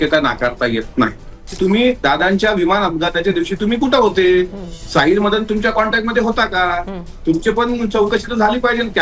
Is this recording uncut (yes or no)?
no